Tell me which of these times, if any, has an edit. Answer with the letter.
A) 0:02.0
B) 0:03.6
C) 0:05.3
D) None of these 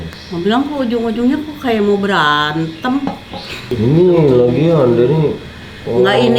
B